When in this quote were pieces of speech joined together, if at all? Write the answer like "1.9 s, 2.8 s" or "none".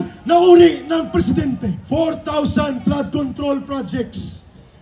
1.7 s